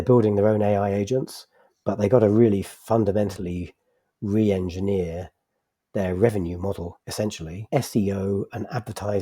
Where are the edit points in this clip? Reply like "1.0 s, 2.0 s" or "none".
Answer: 7.6 s